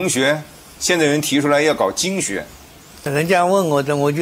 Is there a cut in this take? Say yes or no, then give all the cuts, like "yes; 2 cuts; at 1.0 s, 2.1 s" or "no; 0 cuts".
yes; 1 cut; at 3.1 s